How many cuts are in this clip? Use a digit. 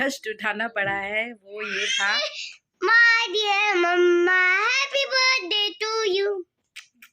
1